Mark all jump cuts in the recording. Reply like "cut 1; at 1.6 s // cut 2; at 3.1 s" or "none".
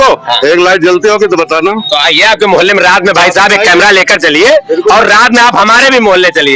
none

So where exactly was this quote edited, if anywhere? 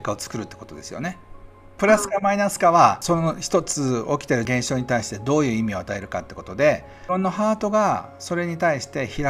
cut 1; at 1.7 s // cut 2; at 3.0 s // cut 3; at 4.5 s // cut 4; at 6.9 s

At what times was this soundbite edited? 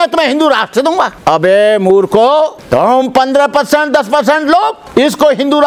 cut 1; at 1.1 s // cut 2; at 2.6 s // cut 3; at 4.8 s

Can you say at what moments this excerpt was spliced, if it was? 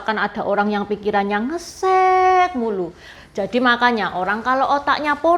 cut 1; at 3.1 s

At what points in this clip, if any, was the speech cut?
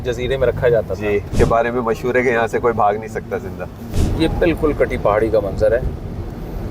cut 1; at 1.3 s // cut 2; at 3.9 s

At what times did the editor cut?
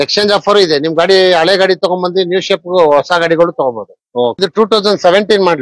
cut 1; at 4.4 s

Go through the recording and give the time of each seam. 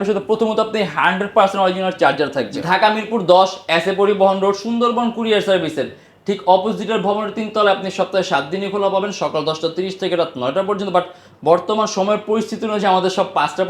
cut 1; at 2.5 s

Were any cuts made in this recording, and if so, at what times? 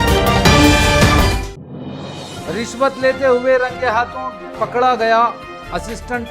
cut 1; at 1.3 s // cut 2; at 2.5 s

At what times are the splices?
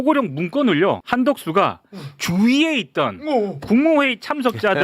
cut 1; at 1.0 s

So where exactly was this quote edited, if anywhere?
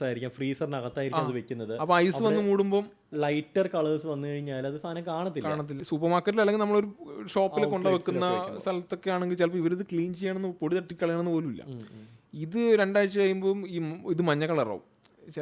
cut 1; at 5.8 s

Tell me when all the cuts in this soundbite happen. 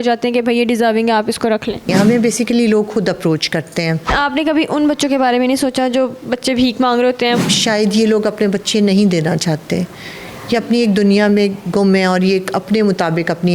cut 1; at 1.9 s // cut 2; at 4.0 s // cut 3; at 7.4 s

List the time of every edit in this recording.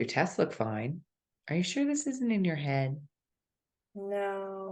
none

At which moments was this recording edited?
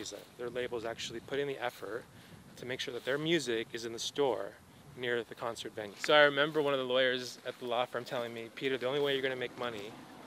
cut 1; at 5.9 s

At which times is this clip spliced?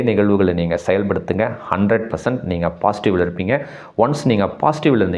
none

